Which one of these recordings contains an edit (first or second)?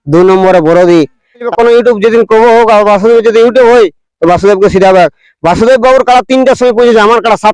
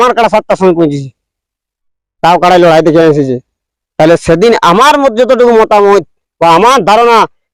first